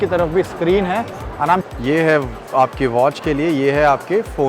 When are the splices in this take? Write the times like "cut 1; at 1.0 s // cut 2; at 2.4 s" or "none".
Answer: cut 1; at 1.6 s